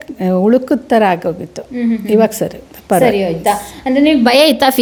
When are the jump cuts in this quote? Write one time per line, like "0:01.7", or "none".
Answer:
none